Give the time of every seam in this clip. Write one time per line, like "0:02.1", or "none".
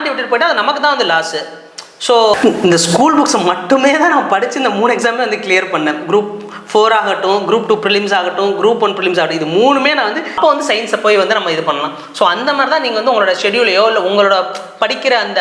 0:02.3
0:10.3